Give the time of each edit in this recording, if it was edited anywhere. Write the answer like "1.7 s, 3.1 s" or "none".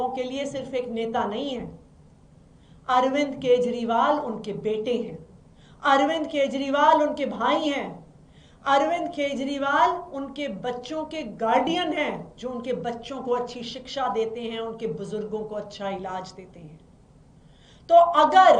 none